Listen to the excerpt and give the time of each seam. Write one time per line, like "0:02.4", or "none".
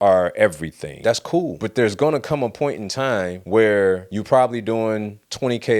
0:01.2